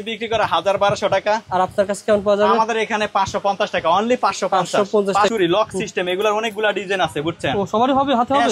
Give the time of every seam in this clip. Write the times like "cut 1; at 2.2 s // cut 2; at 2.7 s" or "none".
cut 1; at 5.3 s